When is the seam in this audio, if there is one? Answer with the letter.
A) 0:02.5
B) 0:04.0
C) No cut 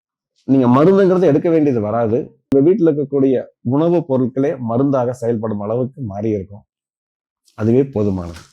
A